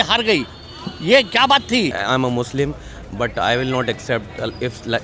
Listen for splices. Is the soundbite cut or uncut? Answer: cut